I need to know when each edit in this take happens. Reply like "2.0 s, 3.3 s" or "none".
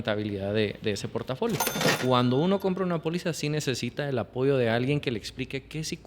1.9 s

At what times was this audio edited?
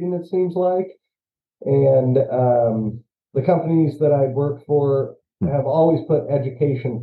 none

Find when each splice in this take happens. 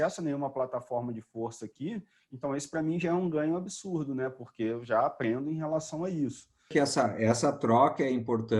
6.6 s

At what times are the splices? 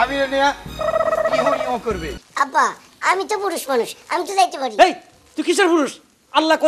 2.2 s

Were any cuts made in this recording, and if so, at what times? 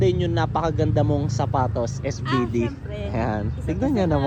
none

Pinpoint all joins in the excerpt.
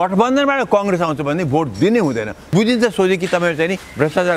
2.4 s

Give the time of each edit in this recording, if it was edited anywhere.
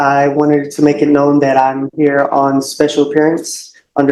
none

